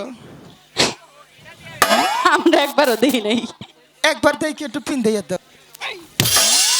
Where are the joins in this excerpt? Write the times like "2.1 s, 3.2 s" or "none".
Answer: 5.4 s